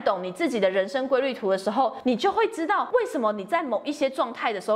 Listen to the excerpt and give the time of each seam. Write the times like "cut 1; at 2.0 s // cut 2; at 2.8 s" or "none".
cut 1; at 2.0 s // cut 2; at 2.9 s